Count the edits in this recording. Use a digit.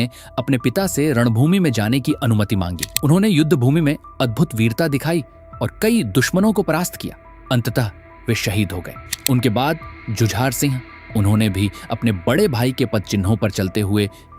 2